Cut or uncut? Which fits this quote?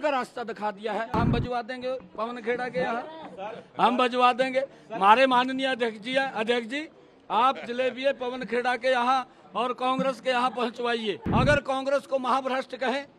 cut